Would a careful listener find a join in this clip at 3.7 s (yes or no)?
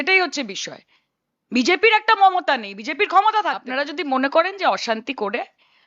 yes